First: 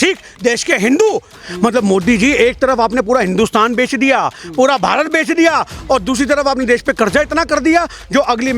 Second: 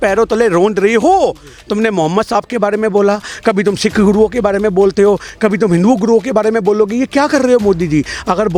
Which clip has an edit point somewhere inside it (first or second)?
first